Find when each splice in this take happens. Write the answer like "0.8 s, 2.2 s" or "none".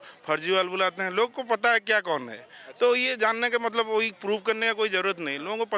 none